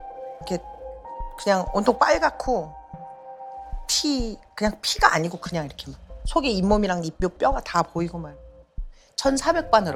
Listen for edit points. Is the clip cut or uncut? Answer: uncut